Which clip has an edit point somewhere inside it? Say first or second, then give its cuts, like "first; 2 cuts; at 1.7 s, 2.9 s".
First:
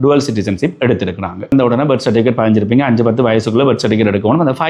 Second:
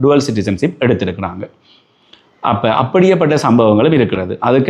first; 1 cut; at 1.5 s